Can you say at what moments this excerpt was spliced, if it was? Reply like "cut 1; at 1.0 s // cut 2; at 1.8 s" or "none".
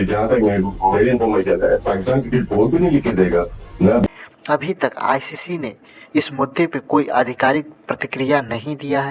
cut 1; at 4.0 s